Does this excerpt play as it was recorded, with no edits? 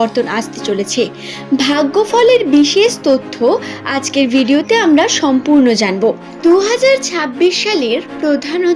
no; 1 cut; at 6.3 s

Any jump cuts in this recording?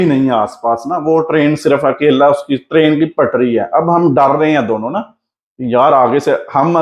no; 0 cuts

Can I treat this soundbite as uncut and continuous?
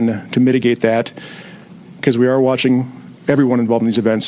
yes; 0 cuts

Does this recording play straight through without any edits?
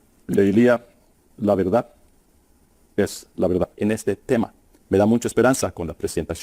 no; 1 cut; at 3.7 s

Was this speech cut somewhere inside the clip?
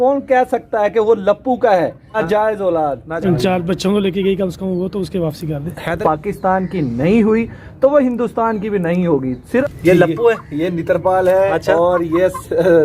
yes; 4 cuts; at 2.0 s, 3.1 s, 6.0 s, 9.4 s

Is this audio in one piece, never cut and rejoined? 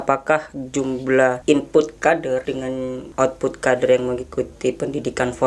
no; 2 cuts; at 1.4 s, 2.6 s

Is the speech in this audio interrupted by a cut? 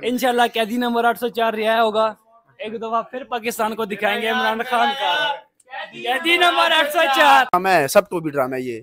yes; 1 cut; at 7.5 s

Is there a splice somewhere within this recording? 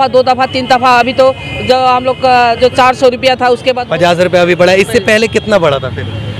yes; 1 cut; at 3.8 s

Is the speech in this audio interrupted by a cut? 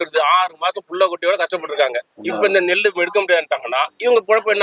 no; 0 cuts

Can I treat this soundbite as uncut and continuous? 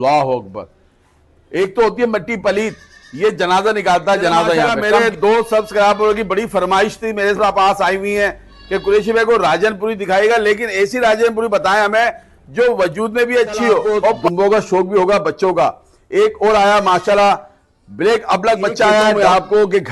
no; 3 cuts; at 4.7 s, 14.2 s, 19.1 s

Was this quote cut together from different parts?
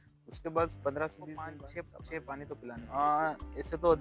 yes; 2 cuts; at 1.6 s, 2.8 s

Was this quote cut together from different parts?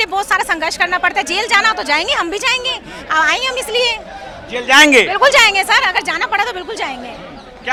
no; 0 cuts

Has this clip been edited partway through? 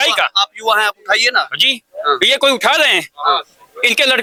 no; 0 cuts

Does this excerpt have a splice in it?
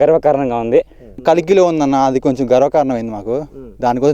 yes; 1 cut; at 1.2 s

